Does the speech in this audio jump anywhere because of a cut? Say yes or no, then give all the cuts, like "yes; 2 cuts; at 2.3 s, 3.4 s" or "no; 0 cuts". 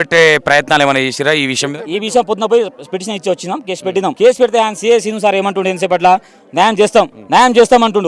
yes; 2 cuts; at 4.2 s, 7.2 s